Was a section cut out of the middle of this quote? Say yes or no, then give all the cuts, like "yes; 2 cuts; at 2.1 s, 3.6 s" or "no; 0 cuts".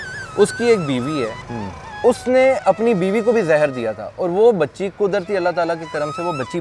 no; 0 cuts